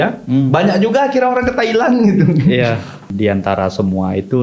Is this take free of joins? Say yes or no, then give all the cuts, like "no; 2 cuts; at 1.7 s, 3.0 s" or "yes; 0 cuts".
no; 1 cut; at 3.1 s